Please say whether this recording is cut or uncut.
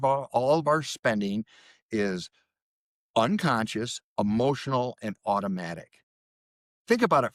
uncut